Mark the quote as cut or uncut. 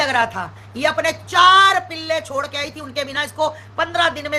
uncut